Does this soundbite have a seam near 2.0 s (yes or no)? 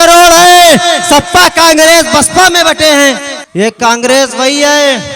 no